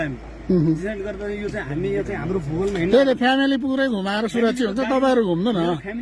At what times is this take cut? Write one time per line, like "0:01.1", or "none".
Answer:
none